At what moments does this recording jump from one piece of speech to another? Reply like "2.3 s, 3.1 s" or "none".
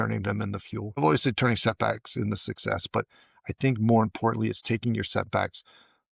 1.0 s

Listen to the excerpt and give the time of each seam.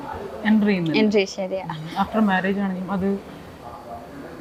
none

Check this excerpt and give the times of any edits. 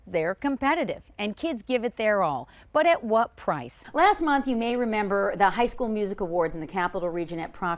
3.7 s

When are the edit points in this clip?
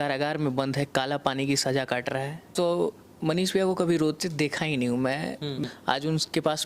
2.5 s, 5.6 s

